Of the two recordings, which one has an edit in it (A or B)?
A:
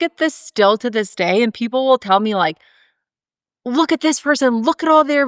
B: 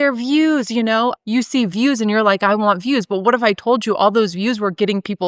B